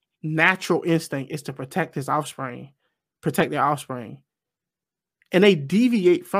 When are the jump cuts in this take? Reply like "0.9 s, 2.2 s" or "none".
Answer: none